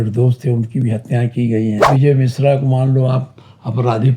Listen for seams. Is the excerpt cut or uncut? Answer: cut